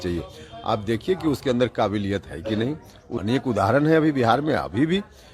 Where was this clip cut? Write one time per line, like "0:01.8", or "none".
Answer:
0:03.1